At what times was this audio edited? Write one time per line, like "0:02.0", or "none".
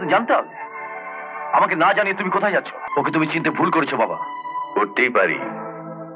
0:02.8